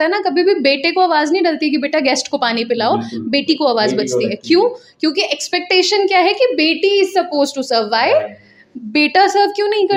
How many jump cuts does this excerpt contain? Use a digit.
0